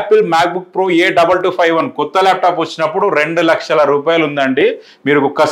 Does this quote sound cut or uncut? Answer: uncut